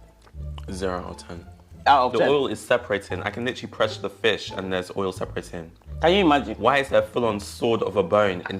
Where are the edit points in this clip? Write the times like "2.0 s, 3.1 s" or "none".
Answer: 1.9 s